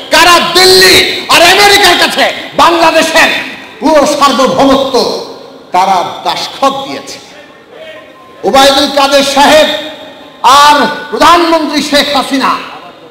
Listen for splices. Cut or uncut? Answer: uncut